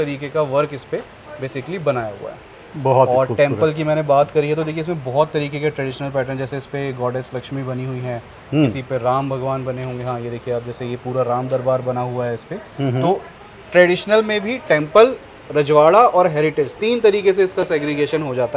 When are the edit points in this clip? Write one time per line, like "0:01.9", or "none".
none